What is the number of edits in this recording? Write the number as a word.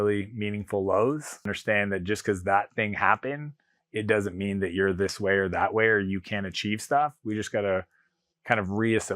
one